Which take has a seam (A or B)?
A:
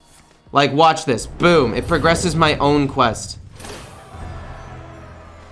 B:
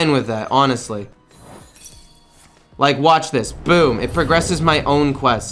B